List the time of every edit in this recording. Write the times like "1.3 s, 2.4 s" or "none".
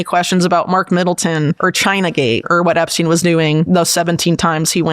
1.6 s, 2.5 s, 3.7 s